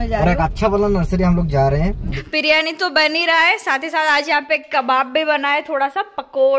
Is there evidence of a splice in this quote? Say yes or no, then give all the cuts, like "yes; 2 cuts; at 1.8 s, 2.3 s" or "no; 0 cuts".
yes; 1 cut; at 2.3 s